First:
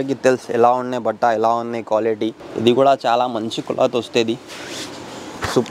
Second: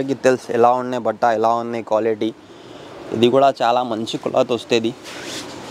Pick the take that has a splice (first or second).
first